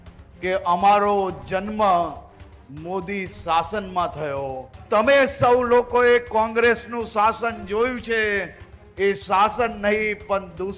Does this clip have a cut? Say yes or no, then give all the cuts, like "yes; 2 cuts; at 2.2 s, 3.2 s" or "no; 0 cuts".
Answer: yes; 1 cut; at 4.8 s